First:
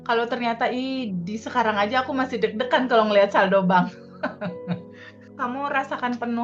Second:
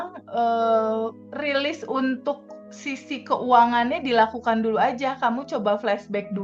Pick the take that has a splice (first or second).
first